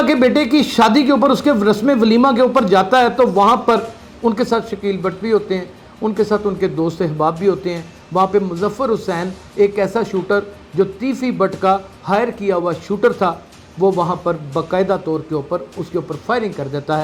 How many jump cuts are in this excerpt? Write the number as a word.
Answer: zero